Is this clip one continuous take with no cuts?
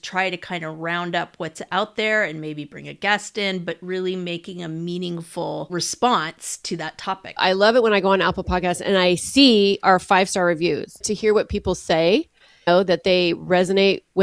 no; 3 cuts; at 5.7 s, 7.4 s, 11.1 s

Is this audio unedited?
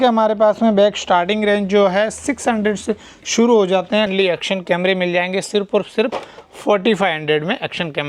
no; 1 cut; at 4.1 s

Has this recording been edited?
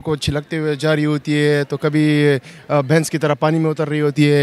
no; 0 cuts

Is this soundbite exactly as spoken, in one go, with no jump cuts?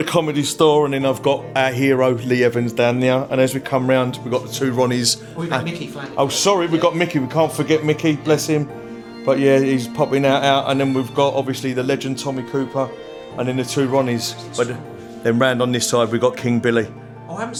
yes; 0 cuts

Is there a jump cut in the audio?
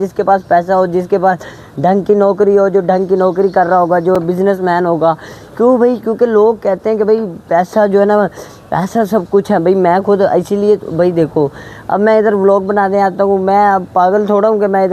no; 0 cuts

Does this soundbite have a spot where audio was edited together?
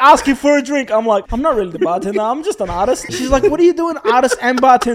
yes; 2 cuts; at 1.3 s, 3.1 s

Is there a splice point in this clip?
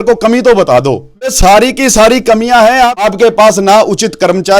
yes; 2 cuts; at 1.3 s, 3.1 s

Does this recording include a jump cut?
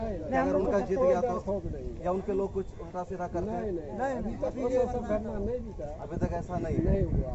no; 0 cuts

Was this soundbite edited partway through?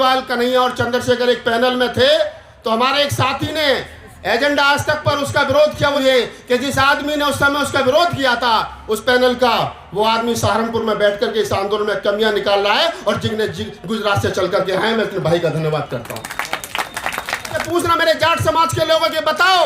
yes; 2 cuts; at 6.0 s, 17.6 s

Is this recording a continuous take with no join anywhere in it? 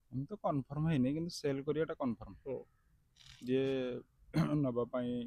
yes; 0 cuts

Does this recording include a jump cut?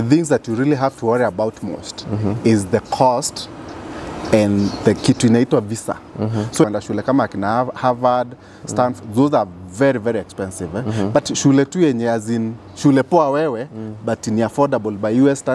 yes; 1 cut; at 6.6 s

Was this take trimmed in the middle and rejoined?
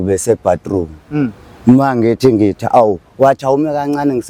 no; 0 cuts

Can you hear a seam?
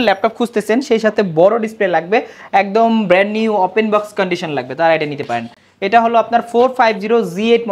no; 0 cuts

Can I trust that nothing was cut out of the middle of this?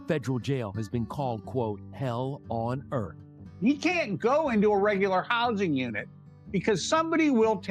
no; 1 cut; at 3.4 s

